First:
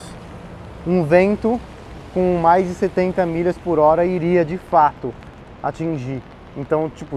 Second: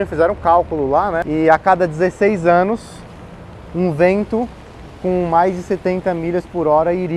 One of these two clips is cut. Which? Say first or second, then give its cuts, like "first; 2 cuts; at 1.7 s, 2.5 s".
second; 1 cut; at 1.2 s